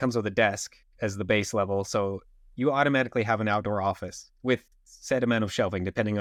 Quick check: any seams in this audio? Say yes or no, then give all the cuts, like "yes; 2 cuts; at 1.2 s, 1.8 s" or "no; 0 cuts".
no; 0 cuts